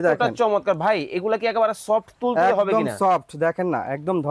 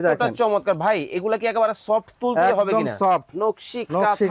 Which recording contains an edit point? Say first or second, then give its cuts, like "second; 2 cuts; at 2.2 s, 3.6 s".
second; 1 cut; at 3.3 s